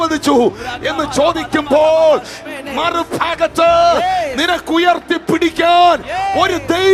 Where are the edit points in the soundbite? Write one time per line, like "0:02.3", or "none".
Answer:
none